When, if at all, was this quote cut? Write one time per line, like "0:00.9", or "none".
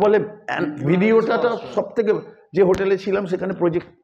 none